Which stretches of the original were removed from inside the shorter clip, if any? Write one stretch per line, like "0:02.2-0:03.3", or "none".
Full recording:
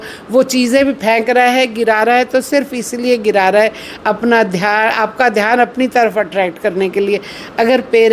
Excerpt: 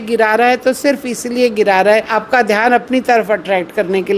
0:03.8-0:05.0